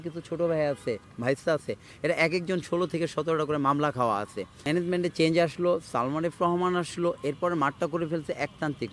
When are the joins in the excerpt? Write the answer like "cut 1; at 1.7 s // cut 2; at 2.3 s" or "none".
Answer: cut 1; at 4.6 s